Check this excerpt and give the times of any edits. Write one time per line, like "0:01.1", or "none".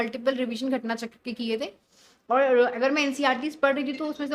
none